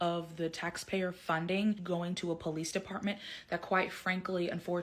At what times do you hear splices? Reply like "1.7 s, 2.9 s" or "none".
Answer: 1.8 s